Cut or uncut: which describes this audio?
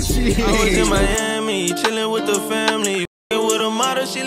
cut